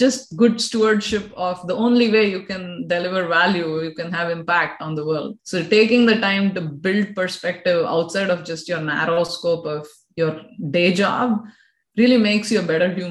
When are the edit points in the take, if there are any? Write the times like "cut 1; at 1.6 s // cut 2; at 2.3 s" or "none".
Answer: cut 1; at 5.4 s